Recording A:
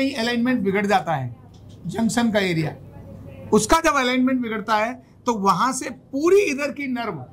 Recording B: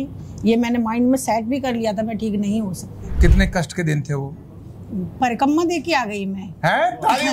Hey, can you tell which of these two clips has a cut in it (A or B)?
B